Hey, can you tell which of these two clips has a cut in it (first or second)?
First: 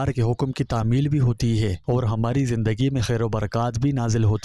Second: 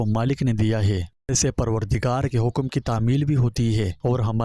second